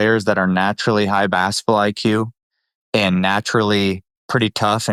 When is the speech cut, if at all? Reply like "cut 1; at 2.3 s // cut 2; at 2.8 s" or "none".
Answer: none